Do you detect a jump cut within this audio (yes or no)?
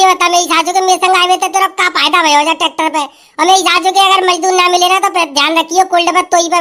no